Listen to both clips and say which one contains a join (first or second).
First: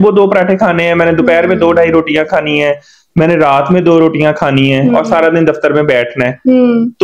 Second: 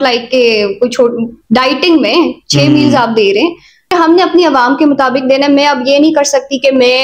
second